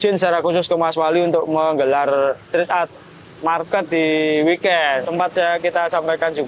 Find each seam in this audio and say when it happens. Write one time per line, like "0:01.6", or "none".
0:05.1